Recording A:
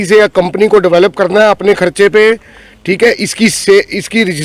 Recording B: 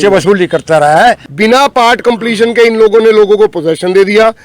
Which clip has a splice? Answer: B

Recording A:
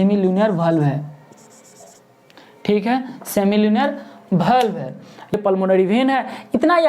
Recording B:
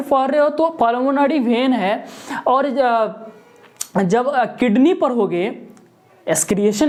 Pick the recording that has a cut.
A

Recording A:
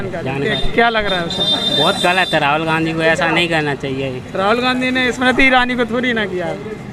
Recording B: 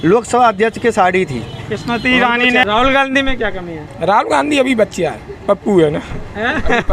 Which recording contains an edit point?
B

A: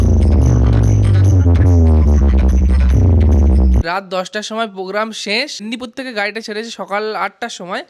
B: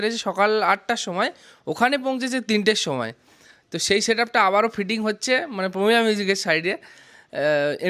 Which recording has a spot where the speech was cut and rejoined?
A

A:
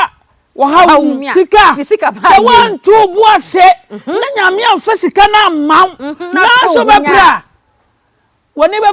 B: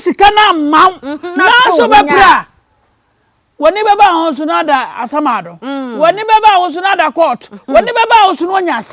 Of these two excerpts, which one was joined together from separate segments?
A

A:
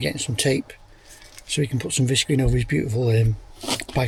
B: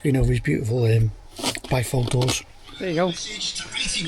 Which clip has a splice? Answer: B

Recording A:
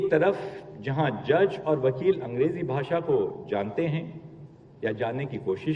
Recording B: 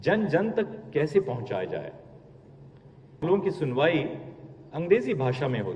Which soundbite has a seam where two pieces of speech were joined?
B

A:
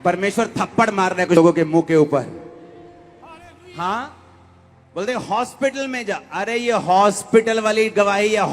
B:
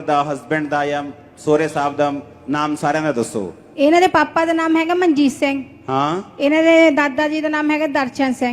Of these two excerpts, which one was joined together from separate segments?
A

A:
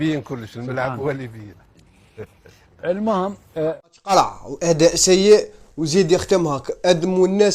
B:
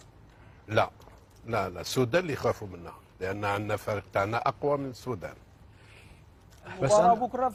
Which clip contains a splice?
A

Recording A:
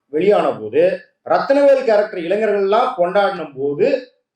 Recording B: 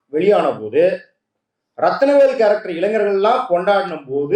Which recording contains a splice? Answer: A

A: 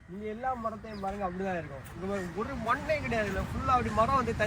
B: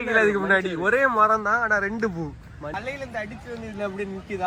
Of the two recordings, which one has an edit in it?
B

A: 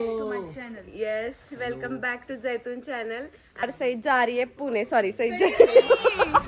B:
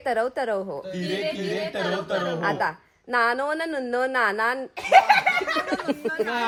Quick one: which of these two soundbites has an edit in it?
A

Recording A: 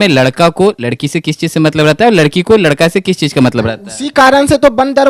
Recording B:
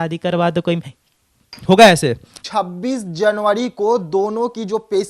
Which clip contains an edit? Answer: B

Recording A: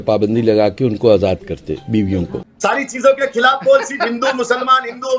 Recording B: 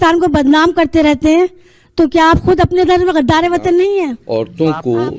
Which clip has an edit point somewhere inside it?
B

